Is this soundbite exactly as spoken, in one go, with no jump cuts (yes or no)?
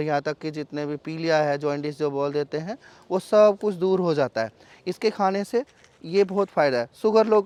yes